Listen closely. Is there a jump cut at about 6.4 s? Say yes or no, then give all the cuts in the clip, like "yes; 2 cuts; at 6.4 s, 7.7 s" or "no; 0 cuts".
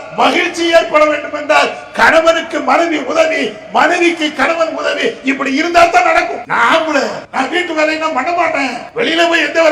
yes; 3 cuts; at 6.4 s, 7.2 s, 8.8 s